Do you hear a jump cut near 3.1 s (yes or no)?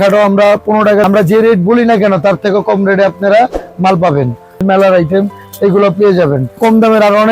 no